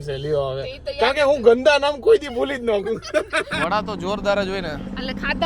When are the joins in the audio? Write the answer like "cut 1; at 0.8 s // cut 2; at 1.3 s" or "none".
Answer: cut 1; at 3.5 s

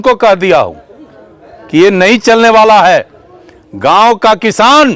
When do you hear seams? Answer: none

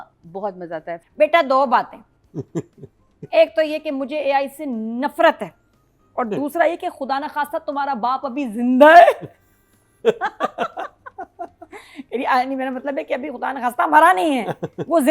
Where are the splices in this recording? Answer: cut 1; at 0.9 s

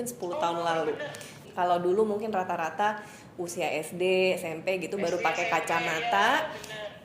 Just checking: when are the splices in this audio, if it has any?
cut 1; at 1.5 s

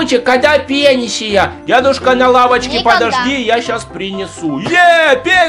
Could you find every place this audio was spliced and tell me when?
none

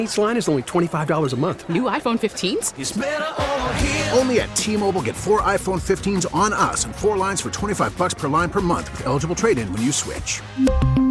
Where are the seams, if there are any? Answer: none

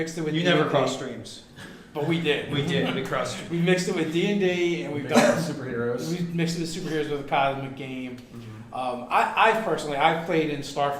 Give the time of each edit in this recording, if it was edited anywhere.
cut 1; at 6.5 s

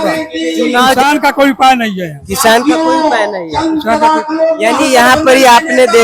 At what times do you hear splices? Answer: cut 1; at 0.9 s

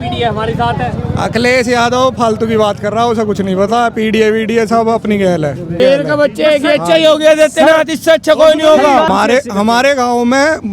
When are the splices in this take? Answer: cut 1; at 5.8 s // cut 2; at 9.1 s

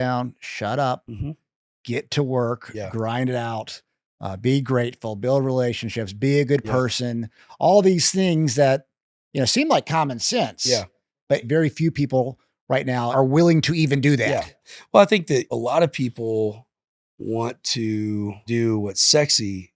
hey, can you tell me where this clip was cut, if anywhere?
cut 1; at 11.5 s // cut 2; at 13.1 s // cut 3; at 15.5 s // cut 4; at 18.5 s

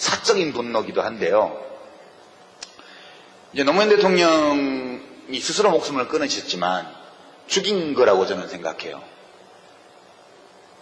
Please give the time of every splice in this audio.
cut 1; at 7.0 s

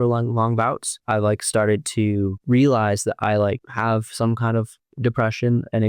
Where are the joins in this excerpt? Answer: cut 1; at 0.9 s // cut 2; at 2.4 s // cut 3; at 3.7 s // cut 4; at 4.8 s

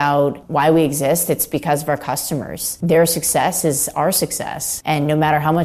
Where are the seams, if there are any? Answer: none

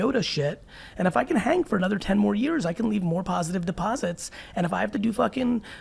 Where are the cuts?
none

